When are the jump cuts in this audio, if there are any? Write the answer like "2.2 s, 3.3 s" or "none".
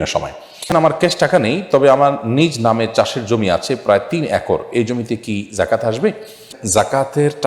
0.7 s, 6.6 s